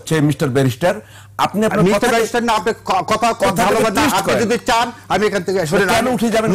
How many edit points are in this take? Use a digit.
0